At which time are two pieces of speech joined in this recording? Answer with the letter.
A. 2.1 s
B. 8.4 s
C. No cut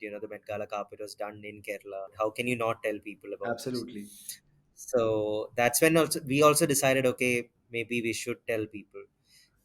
A